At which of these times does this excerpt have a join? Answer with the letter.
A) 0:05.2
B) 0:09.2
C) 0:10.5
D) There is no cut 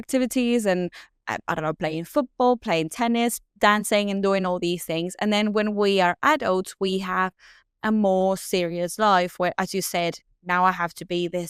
D